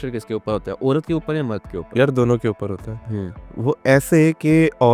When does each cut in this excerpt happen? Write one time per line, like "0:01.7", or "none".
none